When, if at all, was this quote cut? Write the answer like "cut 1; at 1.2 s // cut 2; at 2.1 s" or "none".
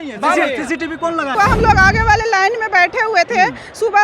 cut 1; at 1.3 s